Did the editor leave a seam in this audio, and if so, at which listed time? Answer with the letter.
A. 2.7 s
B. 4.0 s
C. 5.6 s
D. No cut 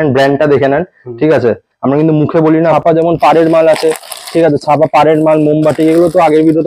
A